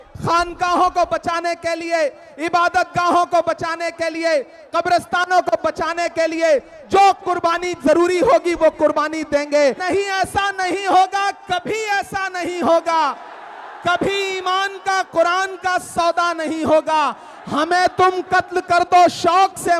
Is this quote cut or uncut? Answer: cut